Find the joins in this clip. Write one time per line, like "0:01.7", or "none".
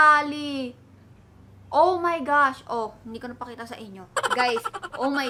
none